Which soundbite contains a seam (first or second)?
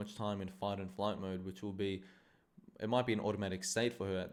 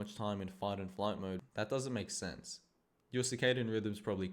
second